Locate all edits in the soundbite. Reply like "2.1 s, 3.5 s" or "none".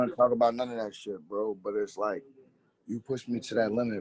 none